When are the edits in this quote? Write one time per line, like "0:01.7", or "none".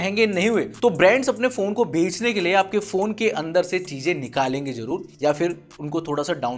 none